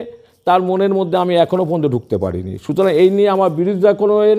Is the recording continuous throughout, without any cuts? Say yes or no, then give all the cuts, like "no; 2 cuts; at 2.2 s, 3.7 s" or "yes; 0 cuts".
yes; 0 cuts